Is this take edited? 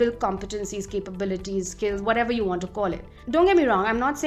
no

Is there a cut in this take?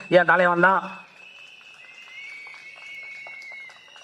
no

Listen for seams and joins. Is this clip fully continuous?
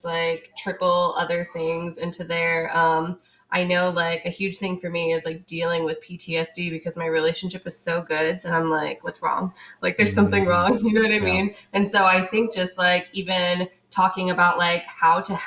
yes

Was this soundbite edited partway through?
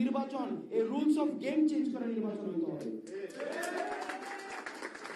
no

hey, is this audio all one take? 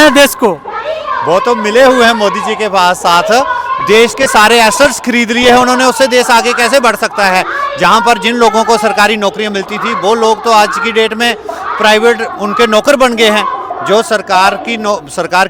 yes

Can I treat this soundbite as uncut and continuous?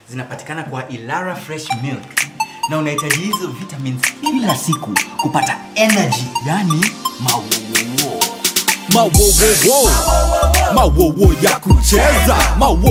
yes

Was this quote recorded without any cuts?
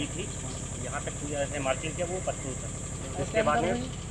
yes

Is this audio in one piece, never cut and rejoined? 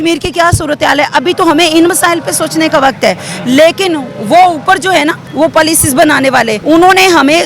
no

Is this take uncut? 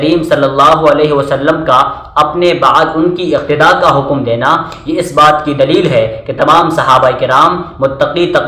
yes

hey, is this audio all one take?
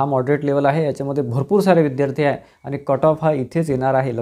yes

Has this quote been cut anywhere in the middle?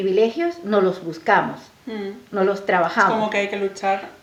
no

